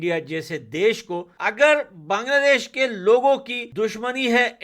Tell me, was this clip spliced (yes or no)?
yes